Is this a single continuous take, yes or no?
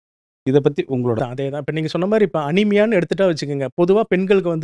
no